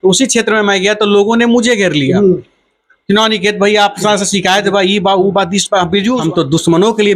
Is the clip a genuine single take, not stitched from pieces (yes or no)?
no